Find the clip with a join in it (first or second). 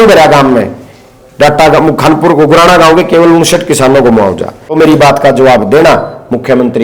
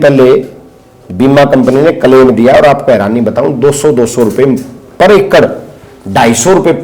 first